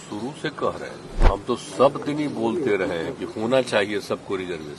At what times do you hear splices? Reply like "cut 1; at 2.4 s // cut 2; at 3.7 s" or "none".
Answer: cut 1; at 1.2 s